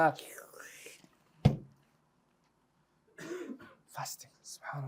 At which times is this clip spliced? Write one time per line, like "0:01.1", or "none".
none